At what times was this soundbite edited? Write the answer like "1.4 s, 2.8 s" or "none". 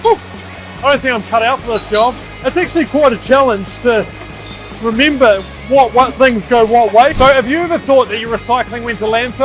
2.3 s, 7.1 s